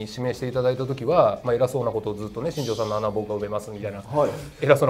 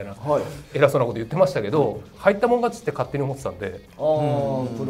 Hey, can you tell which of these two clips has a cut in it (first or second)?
second